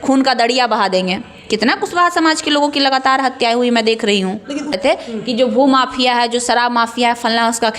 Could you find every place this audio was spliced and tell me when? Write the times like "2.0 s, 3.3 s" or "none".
4.8 s